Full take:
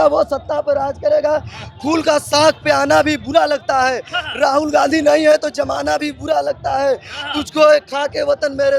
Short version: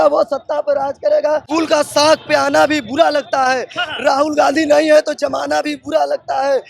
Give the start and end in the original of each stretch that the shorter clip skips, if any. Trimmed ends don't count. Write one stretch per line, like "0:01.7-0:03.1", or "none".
0:01.5-0:01.8